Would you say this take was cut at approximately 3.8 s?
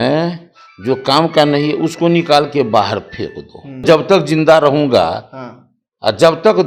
yes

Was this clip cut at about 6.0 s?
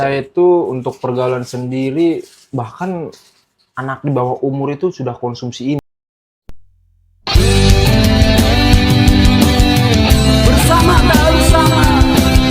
yes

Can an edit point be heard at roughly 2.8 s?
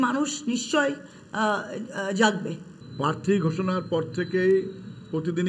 yes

